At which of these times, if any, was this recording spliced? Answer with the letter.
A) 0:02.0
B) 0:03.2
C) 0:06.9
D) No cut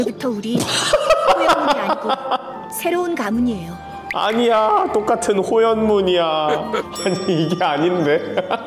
C